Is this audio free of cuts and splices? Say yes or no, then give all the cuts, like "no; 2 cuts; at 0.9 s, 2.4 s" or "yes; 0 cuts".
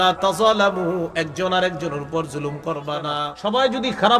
no; 1 cut; at 3.2 s